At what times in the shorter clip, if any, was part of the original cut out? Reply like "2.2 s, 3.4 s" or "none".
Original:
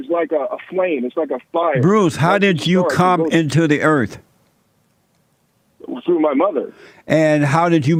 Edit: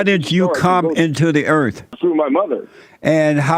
1.9 s